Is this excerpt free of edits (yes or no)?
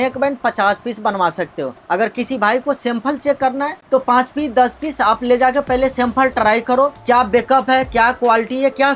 yes